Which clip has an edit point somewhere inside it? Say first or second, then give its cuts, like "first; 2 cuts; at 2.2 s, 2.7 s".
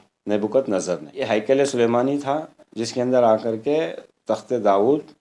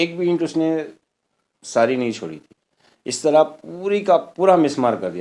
first; 1 cut; at 1.1 s